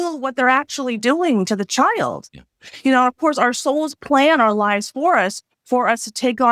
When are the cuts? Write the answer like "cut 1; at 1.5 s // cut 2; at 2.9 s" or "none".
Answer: none